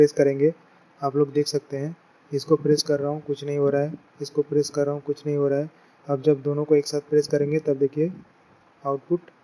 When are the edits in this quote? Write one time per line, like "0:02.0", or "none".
none